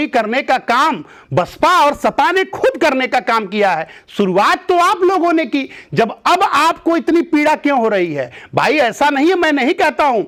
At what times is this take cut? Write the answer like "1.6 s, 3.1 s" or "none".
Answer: none